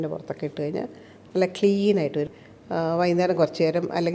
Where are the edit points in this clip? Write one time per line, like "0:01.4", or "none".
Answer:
0:02.3